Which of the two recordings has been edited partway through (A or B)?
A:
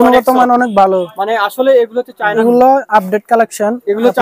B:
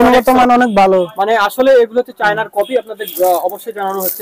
A